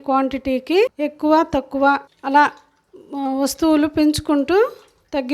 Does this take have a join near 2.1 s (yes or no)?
yes